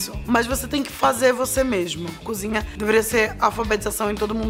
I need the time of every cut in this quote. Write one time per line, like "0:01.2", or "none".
0:02.2